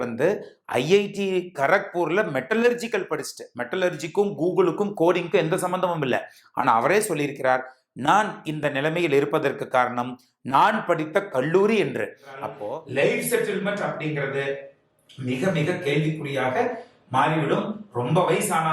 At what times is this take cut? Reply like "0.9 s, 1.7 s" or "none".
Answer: 12.5 s

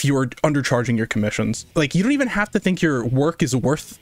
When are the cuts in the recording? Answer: 1.7 s

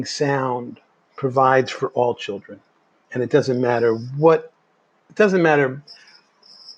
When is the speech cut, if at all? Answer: none

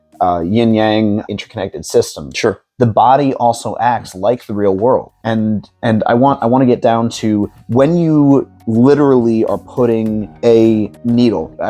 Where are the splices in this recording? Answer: 1.2 s

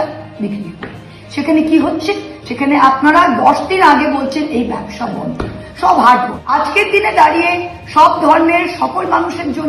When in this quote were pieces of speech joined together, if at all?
6.4 s

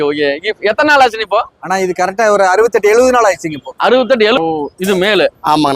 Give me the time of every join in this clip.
4.4 s

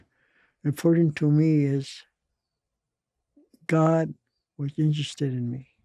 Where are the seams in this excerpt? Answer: none

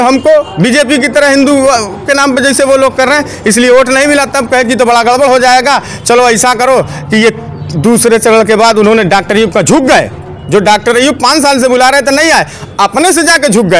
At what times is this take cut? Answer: none

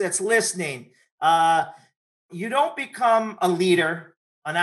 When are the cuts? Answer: 2.3 s

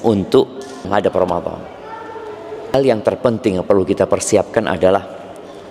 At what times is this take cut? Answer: 0.9 s, 2.7 s

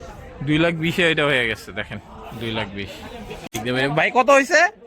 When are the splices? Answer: 3.5 s

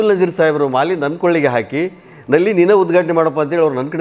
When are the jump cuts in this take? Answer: none

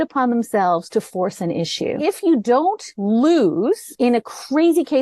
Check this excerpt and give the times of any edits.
2.0 s, 2.9 s, 3.9 s

